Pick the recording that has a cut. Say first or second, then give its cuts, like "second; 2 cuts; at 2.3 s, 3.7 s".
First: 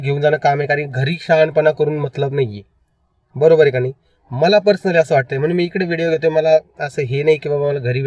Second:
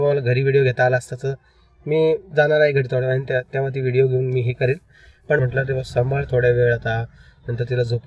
second; 1 cut; at 5.4 s